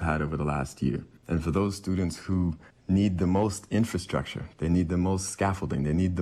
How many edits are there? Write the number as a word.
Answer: two